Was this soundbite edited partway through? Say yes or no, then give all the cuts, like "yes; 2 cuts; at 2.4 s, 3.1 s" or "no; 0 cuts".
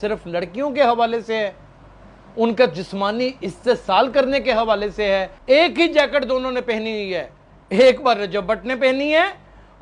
yes; 1 cut; at 5.3 s